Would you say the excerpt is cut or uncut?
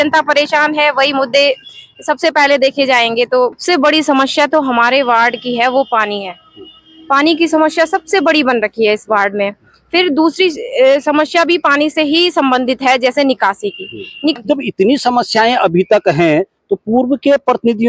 cut